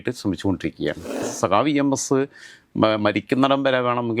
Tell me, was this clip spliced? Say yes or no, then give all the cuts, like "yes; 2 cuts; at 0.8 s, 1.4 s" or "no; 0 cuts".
yes; 1 cut; at 1.3 s